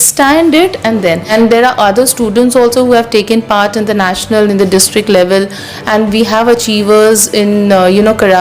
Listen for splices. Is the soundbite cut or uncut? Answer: cut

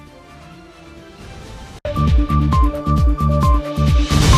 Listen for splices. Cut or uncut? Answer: uncut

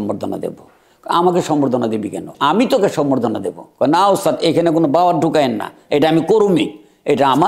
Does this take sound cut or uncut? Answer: cut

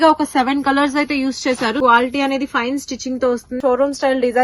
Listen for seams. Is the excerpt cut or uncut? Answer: cut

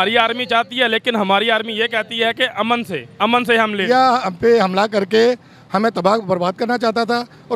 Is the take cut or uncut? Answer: cut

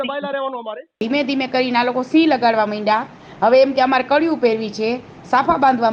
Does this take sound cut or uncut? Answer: cut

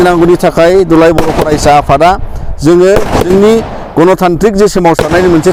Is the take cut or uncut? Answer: uncut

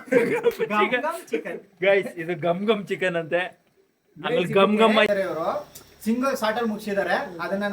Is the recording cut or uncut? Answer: cut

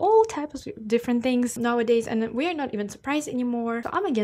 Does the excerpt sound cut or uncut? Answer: uncut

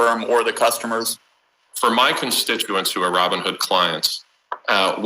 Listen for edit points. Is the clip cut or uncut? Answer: cut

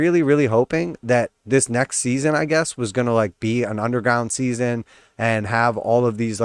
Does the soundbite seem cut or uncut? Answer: cut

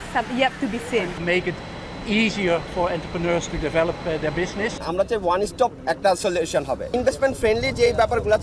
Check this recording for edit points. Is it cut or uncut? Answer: cut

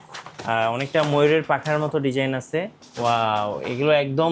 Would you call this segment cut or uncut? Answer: cut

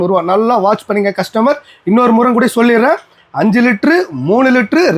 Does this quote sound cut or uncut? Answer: uncut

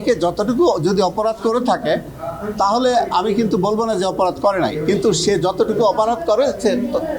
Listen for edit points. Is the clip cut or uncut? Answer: uncut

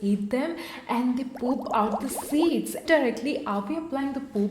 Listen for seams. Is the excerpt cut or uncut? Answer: cut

